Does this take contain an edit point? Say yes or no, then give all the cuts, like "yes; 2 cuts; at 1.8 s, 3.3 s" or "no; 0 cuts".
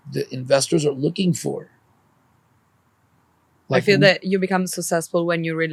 no; 0 cuts